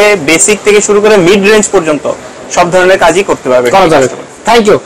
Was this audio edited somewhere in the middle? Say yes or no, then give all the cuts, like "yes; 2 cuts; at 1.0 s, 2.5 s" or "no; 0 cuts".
no; 0 cuts